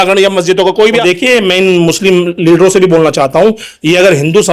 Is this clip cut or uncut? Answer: cut